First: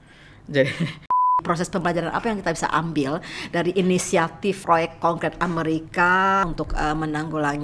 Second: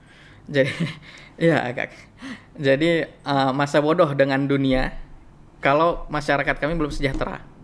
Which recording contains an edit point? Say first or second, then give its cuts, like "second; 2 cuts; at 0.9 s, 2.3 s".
first; 3 cuts; at 1.4 s, 4.6 s, 6.4 s